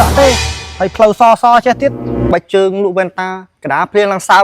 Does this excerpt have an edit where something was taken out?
yes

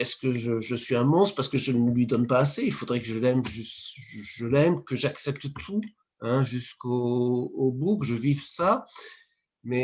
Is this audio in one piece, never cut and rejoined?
yes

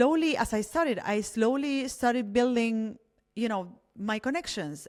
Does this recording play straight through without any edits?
yes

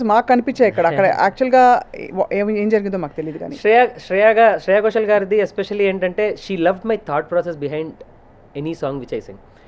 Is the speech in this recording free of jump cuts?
yes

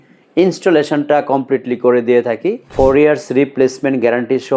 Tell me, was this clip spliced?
yes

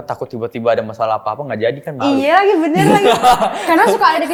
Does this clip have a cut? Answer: no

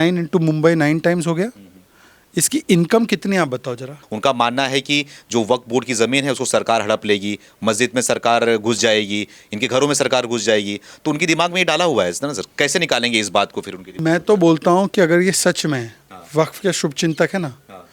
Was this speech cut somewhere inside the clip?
yes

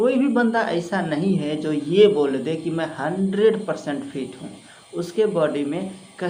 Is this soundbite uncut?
yes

